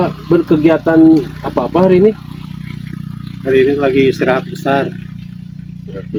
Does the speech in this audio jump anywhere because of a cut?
no; 0 cuts

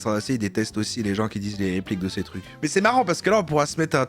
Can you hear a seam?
yes; 1 cut; at 2.5 s

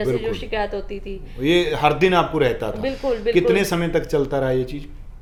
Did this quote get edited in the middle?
no; 0 cuts

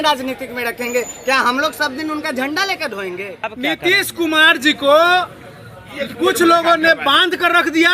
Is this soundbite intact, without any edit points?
no; 1 cut; at 3.5 s

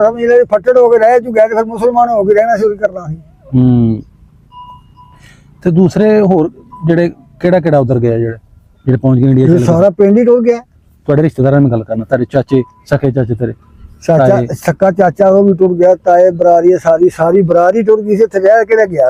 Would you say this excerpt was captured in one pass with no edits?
yes; 0 cuts

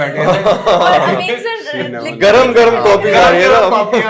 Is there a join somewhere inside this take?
no; 0 cuts

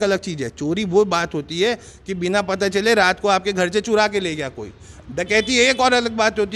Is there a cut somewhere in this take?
no; 0 cuts

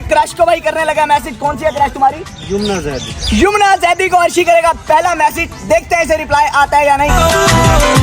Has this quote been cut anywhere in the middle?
no; 0 cuts

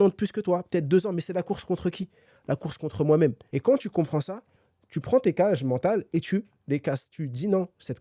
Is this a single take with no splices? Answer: no; 1 cut; at 3.5 s

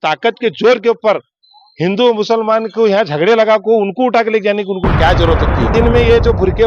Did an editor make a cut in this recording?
yes; 1 cut; at 5.7 s

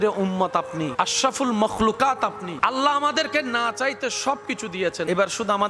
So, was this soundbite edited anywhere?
no; 0 cuts

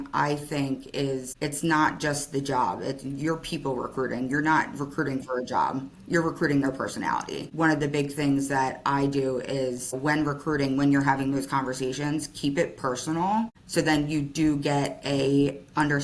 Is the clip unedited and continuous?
no; 4 cuts; at 1.3 s, 7.5 s, 10.0 s, 13.6 s

